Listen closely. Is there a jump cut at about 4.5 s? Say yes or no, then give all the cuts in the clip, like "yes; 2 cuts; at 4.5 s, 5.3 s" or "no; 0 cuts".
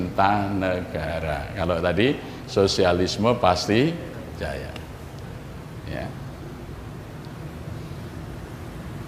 no; 0 cuts